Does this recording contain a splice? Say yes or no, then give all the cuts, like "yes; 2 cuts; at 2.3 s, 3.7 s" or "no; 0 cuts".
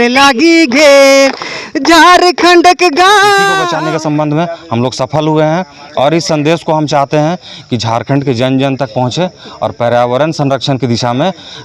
yes; 1 cut; at 3.6 s